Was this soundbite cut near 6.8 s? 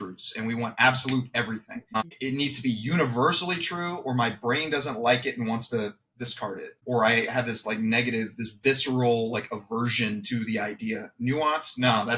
yes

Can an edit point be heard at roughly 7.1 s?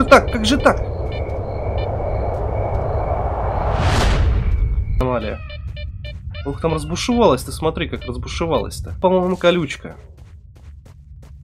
no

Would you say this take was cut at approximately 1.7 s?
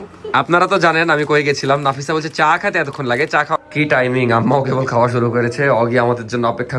no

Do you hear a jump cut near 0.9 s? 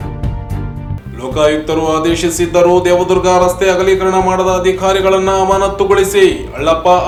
no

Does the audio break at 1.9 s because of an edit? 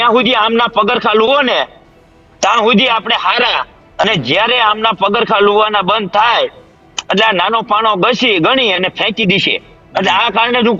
no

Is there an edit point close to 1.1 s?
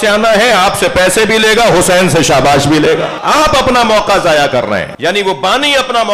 no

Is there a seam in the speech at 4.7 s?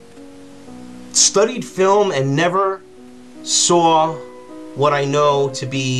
yes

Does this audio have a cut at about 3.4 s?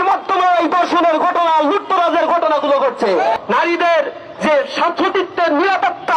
yes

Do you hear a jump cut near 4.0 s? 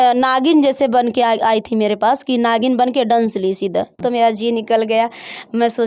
yes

